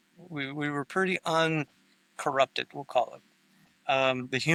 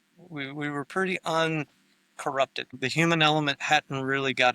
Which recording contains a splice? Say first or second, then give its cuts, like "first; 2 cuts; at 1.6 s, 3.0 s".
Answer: second; 1 cut; at 2.7 s